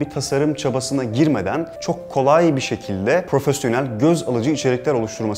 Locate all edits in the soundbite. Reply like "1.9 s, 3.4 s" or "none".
1.7 s, 3.3 s